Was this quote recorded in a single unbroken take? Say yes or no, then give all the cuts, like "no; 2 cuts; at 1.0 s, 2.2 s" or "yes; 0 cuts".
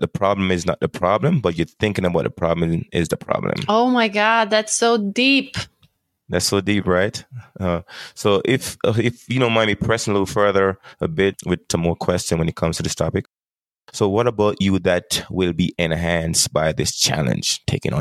yes; 0 cuts